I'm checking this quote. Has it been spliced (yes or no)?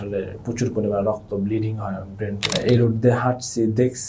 yes